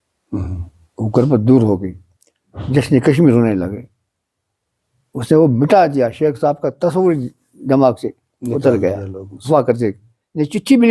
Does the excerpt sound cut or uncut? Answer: cut